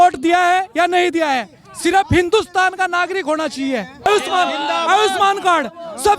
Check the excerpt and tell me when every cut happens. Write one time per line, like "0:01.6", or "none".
0:04.1